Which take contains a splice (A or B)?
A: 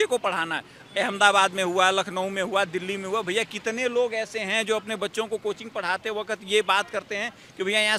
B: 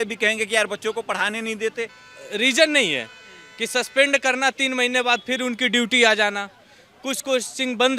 B